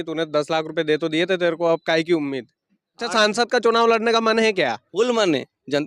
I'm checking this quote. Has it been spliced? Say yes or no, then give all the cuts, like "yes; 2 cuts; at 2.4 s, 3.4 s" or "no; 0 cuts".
yes; 1 cut; at 3.1 s